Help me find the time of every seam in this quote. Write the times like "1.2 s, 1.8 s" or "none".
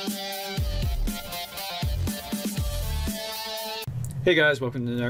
none